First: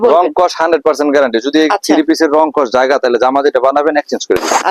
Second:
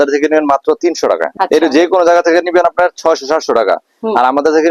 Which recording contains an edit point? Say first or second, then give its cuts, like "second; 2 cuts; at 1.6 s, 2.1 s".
second; 1 cut; at 1.3 s